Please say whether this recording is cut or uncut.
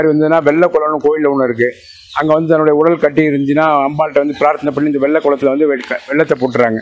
uncut